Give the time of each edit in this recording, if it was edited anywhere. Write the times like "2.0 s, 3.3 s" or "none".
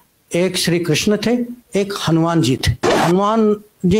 2.9 s